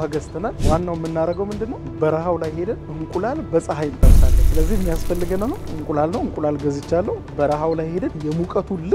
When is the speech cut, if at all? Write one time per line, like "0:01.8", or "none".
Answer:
0:07.3